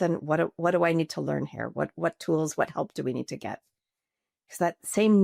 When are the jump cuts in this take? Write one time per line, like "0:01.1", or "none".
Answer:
none